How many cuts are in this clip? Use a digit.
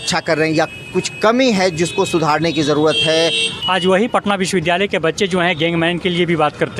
1